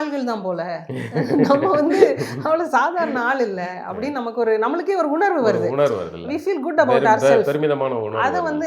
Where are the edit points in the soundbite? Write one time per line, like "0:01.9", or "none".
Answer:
none